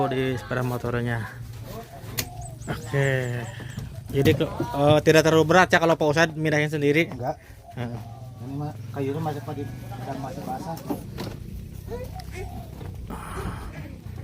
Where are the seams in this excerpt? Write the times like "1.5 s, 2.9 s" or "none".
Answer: 11.1 s